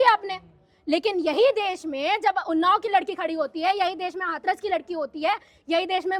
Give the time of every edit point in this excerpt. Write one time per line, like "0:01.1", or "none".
none